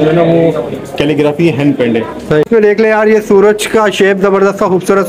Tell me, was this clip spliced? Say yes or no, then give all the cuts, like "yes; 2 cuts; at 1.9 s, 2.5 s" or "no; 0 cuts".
yes; 1 cut; at 2.5 s